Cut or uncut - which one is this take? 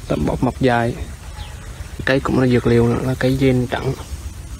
cut